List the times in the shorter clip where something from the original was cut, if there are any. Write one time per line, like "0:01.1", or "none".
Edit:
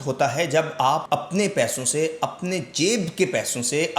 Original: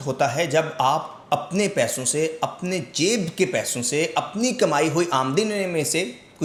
0:01.0

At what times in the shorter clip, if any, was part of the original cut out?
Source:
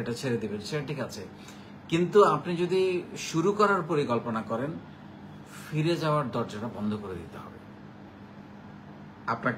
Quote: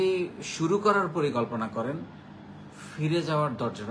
none

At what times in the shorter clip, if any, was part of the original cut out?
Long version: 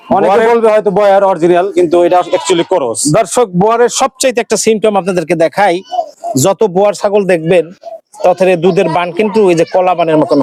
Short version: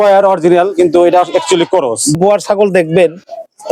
0:02.2

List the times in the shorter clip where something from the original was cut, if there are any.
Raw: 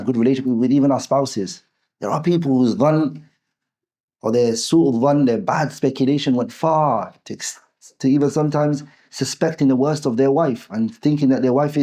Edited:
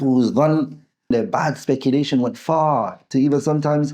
0:01.1
0:03.0

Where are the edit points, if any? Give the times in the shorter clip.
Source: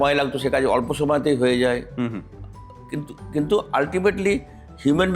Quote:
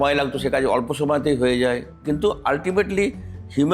0:01.9

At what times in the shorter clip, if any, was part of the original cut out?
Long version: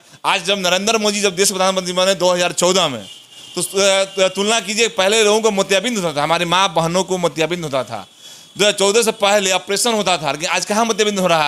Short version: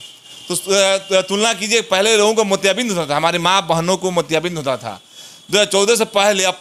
none

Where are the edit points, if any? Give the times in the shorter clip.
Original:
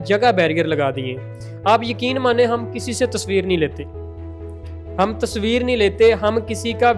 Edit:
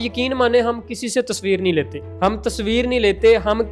0:02.0

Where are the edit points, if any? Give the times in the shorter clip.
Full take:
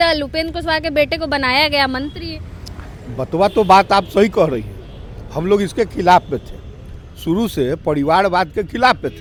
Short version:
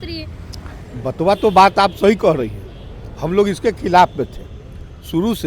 none

